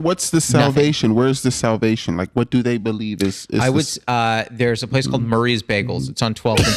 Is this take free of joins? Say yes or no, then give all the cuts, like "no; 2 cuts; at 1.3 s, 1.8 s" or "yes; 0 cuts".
yes; 0 cuts